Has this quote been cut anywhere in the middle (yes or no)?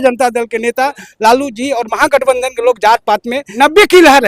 yes